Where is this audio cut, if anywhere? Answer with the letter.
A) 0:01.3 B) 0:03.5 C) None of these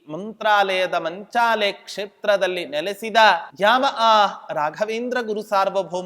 B